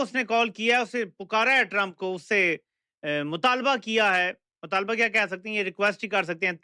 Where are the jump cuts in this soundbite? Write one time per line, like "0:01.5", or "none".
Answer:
none